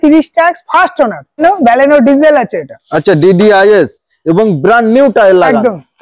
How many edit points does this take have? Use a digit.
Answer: 1